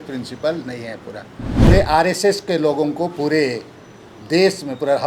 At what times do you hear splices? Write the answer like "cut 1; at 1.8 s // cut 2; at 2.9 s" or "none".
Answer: cut 1; at 1.7 s